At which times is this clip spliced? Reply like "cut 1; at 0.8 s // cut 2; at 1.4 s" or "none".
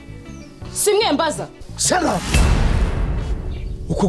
cut 1; at 1.7 s